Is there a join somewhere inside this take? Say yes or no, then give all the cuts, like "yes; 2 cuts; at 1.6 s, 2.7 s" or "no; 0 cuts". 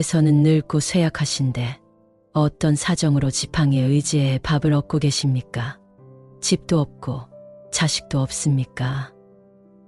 no; 0 cuts